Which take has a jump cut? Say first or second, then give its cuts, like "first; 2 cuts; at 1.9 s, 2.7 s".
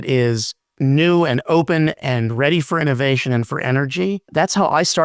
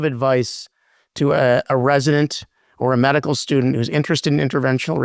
second; 1 cut; at 1.7 s